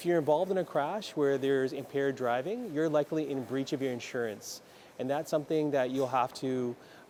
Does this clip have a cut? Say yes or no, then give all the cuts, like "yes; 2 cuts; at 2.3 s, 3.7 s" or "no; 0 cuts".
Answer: no; 0 cuts